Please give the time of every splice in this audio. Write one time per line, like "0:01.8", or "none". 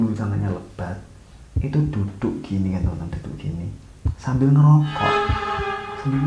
none